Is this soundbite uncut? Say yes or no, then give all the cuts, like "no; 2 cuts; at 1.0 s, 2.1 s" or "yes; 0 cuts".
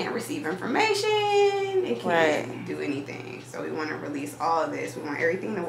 yes; 0 cuts